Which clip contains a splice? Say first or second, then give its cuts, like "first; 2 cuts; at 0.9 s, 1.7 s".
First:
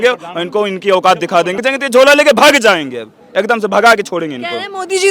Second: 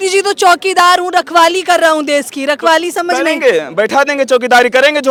first; 1 cut; at 1.6 s